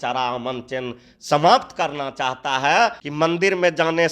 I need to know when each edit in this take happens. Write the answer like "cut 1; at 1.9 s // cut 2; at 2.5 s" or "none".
cut 1; at 3.0 s